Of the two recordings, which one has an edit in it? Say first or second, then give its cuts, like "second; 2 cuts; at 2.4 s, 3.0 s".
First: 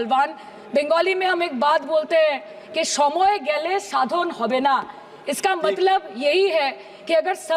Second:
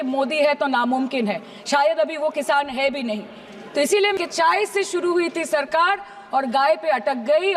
second; 1 cut; at 4.1 s